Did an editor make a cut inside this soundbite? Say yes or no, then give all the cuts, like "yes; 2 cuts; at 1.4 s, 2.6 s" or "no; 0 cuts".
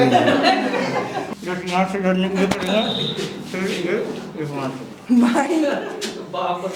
yes; 1 cut; at 1.2 s